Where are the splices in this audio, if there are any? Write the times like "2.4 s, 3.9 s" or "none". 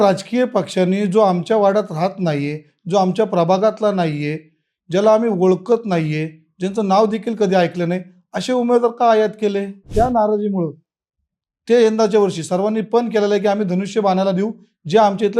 9.8 s